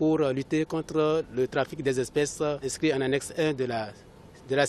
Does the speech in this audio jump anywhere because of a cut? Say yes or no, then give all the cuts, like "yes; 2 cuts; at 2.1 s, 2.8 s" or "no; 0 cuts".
yes; 1 cut; at 2.7 s